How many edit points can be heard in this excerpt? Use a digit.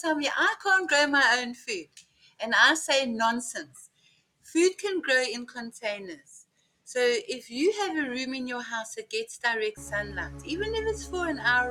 0